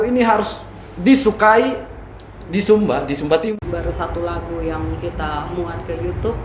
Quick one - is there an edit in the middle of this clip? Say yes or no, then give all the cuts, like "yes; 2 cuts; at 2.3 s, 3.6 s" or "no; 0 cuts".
yes; 1 cut; at 3.4 s